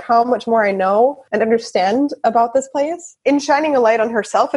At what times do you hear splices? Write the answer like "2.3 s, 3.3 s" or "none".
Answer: 1.2 s, 3.1 s